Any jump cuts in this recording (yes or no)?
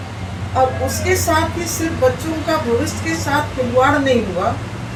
no